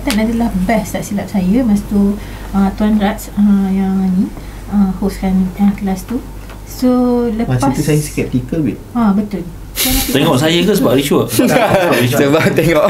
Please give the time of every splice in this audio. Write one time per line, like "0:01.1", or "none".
none